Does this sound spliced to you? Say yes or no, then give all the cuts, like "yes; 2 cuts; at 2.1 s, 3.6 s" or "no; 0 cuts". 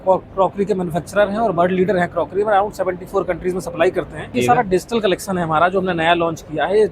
yes; 1 cut; at 4.3 s